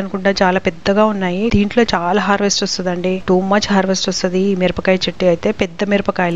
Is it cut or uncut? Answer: cut